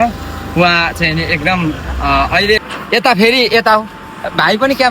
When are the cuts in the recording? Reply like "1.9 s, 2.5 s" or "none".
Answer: 2.6 s